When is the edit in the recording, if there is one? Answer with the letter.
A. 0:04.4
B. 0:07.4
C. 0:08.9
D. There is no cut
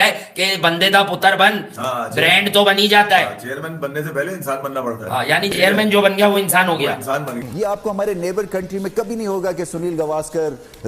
B